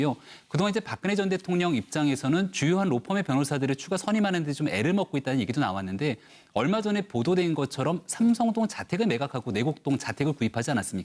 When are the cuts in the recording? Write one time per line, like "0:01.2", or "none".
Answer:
0:01.7